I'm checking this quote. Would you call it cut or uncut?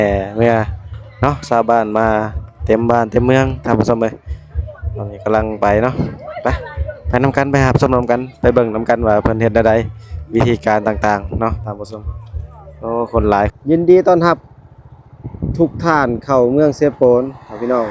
cut